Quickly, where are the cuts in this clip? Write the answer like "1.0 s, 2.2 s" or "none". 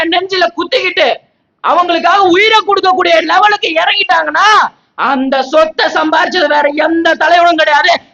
none